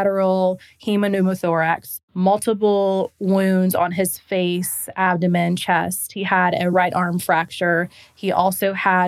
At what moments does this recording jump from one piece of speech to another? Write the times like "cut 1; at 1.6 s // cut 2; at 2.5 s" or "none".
cut 1; at 1.9 s // cut 2; at 6.7 s